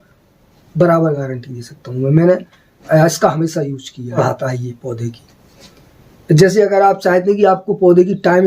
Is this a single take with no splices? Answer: no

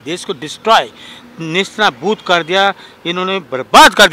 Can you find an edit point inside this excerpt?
no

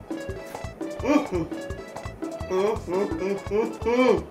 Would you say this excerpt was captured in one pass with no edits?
no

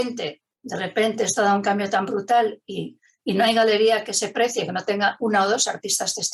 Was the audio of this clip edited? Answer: no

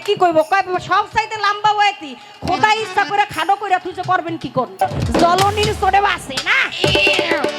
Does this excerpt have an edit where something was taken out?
yes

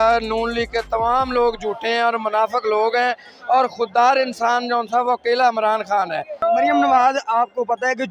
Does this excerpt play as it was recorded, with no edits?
no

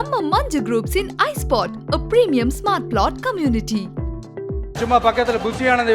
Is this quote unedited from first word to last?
no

